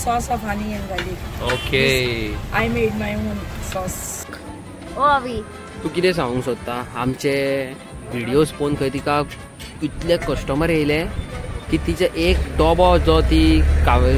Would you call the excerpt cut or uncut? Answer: uncut